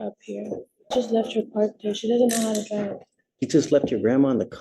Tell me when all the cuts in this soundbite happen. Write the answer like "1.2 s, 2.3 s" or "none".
0.9 s